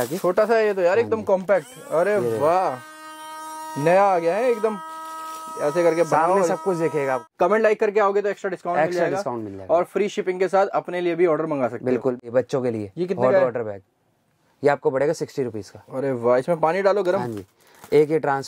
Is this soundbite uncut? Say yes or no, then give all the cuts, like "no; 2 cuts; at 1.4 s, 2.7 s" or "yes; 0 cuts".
no; 2 cuts; at 7.2 s, 12.2 s